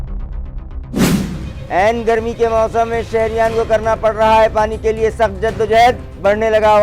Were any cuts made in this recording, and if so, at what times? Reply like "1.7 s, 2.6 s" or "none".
1.1 s